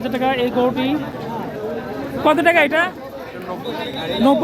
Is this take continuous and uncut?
no; 1 cut; at 1.1 s

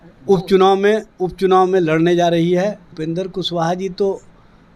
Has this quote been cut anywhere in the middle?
yes; 1 cut; at 3.0 s

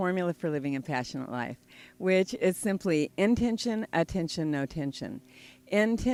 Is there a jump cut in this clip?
no; 0 cuts

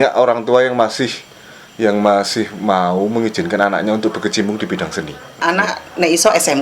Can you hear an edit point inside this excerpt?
yes; 1 cut; at 5.4 s

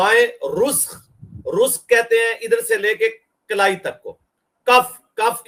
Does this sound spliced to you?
no; 0 cuts

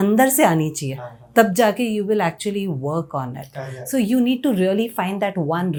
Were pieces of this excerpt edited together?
no; 0 cuts

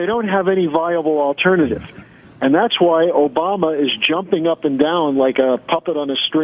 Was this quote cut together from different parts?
no; 0 cuts

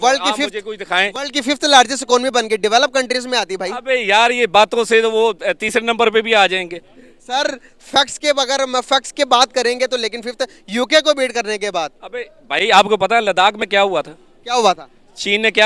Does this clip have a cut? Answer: no; 0 cuts

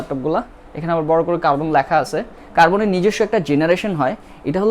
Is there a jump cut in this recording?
no; 0 cuts

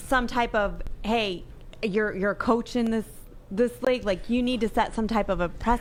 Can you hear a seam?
no; 0 cuts

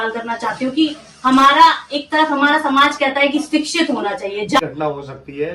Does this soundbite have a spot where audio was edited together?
yes; 1 cut; at 4.6 s

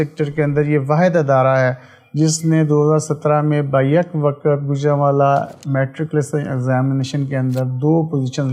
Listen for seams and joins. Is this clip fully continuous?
yes; 0 cuts

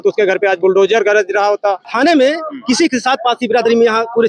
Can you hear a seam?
yes; 1 cut; at 1.9 s

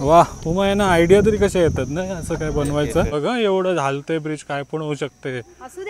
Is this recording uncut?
no; 1 cut; at 3.1 s

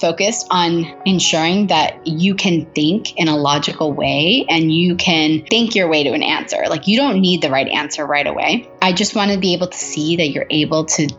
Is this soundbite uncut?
no; 2 cuts; at 0.9 s, 2.0 s

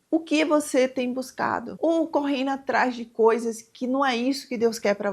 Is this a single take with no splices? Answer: no; 1 cut; at 1.7 s

